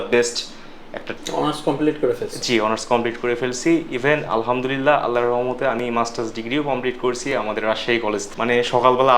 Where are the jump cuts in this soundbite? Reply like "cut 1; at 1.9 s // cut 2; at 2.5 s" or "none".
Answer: cut 1; at 1.0 s // cut 2; at 8.3 s